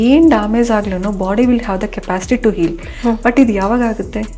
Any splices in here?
no; 0 cuts

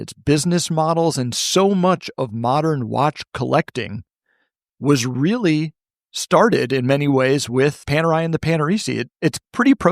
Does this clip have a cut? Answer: yes; 2 cuts; at 7.9 s, 9.1 s

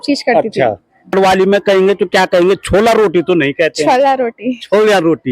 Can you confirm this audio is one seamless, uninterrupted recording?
no; 1 cut; at 1.1 s

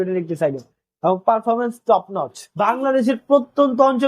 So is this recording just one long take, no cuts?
no; 1 cut; at 2.4 s

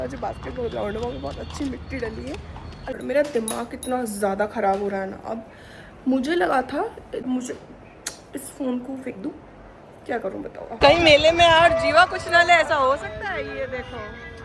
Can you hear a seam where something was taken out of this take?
yes; 3 cuts; at 2.8 s, 7.2 s, 10.8 s

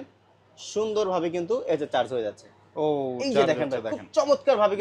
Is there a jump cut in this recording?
no; 0 cuts

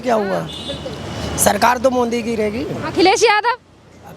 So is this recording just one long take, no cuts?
yes; 0 cuts

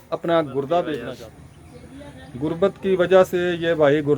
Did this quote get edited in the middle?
yes; 1 cut; at 1.1 s

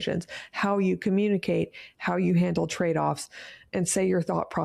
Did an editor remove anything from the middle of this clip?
no; 0 cuts

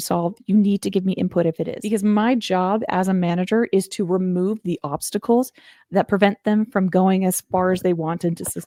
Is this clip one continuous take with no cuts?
yes; 0 cuts

